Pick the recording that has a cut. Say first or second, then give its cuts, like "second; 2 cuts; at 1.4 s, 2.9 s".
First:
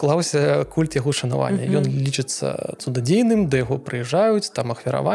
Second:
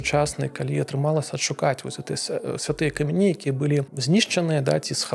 second; 1 cut; at 3.9 s